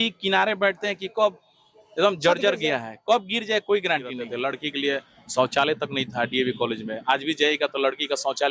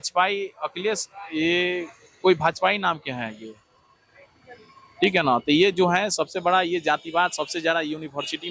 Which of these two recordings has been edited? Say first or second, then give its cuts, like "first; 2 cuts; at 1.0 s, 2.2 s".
first; 1 cut; at 4.3 s